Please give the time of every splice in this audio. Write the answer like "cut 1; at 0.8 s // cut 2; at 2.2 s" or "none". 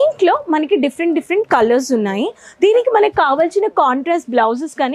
none

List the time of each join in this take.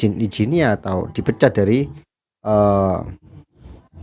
none

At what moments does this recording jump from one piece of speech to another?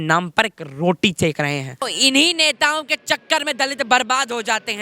cut 1; at 1.9 s

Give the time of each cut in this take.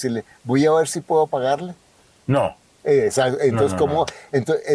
none

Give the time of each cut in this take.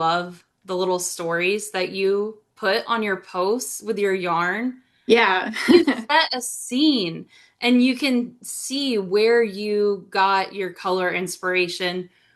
none

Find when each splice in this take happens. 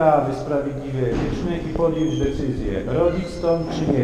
none

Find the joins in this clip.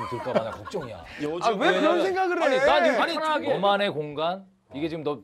cut 1; at 3.4 s

